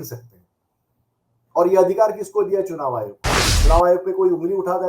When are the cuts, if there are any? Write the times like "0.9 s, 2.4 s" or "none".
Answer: 3.5 s